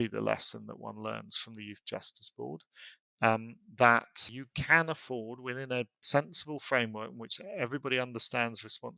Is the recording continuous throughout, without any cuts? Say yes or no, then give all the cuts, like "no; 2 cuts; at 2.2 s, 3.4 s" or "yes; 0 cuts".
yes; 0 cuts